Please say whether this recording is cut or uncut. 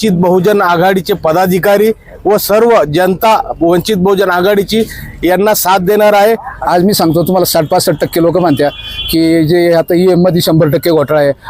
cut